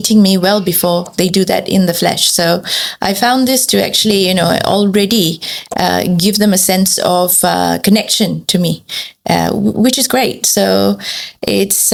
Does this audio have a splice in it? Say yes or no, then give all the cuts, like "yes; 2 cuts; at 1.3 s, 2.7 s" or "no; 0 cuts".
no; 0 cuts